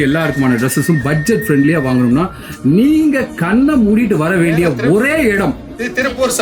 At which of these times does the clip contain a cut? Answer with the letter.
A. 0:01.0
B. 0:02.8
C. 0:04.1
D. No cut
D